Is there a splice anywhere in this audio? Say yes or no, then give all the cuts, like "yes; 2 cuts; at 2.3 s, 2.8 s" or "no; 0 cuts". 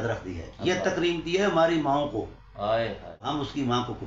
yes; 1 cut; at 3.1 s